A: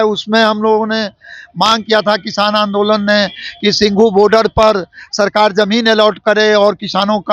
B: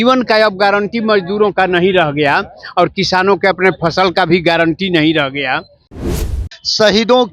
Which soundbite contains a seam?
B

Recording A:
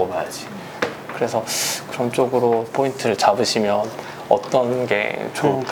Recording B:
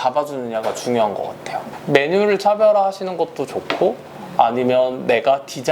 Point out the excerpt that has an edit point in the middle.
B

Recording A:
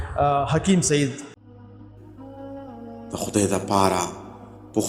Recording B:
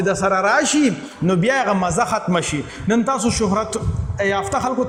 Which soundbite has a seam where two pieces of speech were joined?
A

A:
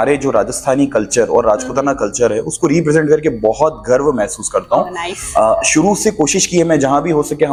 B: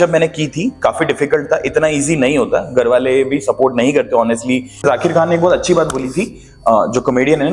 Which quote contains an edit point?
B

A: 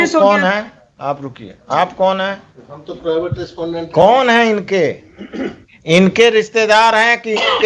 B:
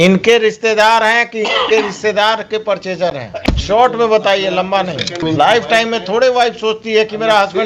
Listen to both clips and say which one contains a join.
B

